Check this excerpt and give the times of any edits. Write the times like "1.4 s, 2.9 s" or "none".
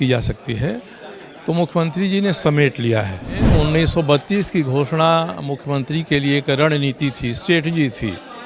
3.5 s